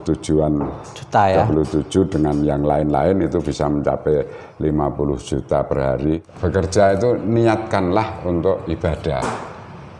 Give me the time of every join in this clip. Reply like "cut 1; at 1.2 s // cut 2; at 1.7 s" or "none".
cut 1; at 6.2 s